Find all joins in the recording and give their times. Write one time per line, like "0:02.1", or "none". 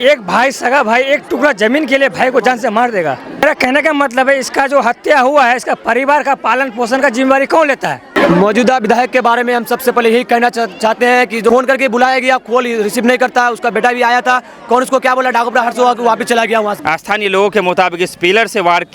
0:03.4
0:08.0
0:17.1

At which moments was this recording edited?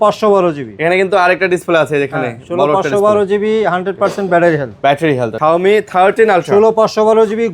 0:05.3

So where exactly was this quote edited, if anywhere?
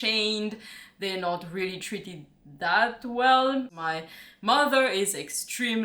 0:03.7

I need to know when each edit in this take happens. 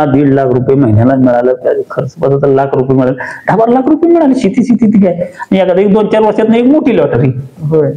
none

